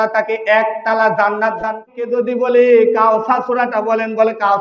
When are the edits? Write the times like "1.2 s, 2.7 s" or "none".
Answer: 1.9 s